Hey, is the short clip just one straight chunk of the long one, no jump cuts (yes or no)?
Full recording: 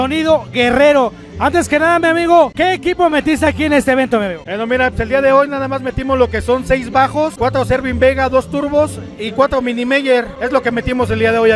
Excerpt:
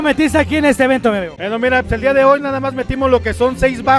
yes